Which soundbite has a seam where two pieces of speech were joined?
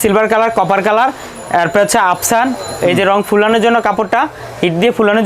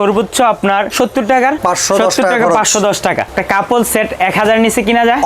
second; 3 cuts; at 0.9 s, 1.6 s, 3.3 s

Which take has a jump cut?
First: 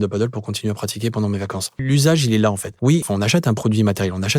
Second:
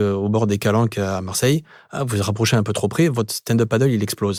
first; 2 cuts; at 1.8 s, 3.0 s

